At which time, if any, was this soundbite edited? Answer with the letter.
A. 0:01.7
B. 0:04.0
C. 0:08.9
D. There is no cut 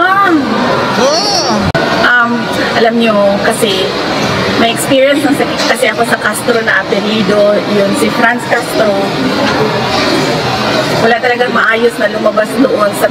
A